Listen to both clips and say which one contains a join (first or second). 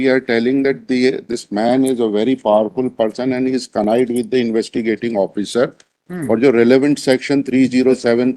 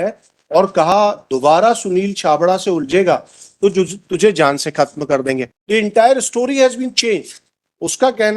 second